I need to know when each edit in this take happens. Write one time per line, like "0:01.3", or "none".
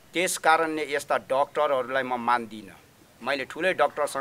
none